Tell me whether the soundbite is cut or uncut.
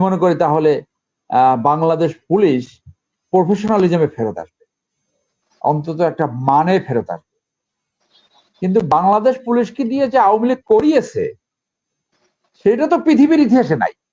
uncut